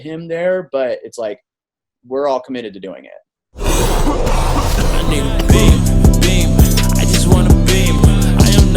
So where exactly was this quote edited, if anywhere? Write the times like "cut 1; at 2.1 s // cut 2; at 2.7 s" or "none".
cut 1; at 3.5 s